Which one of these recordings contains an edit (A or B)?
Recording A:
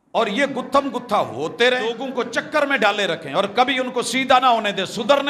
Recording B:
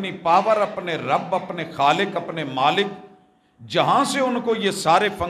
A